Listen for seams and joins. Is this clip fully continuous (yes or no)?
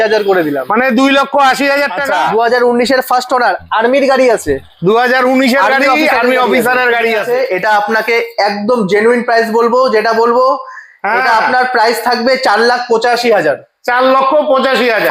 no